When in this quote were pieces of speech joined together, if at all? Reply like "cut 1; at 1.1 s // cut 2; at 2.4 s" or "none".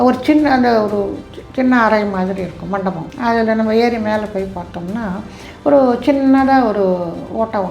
cut 1; at 3.1 s